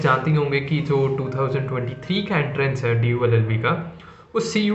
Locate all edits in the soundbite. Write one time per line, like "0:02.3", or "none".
none